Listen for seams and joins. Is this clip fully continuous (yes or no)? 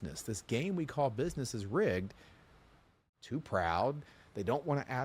no